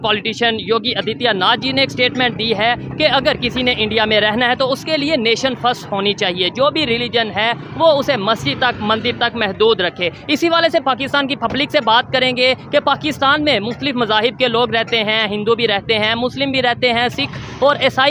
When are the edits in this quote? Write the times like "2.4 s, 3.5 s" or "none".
none